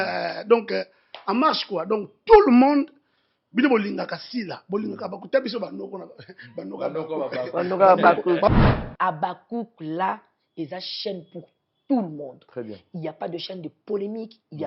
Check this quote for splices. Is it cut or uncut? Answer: cut